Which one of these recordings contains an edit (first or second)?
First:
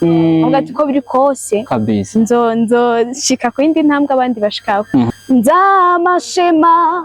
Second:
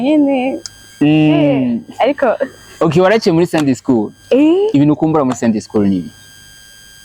first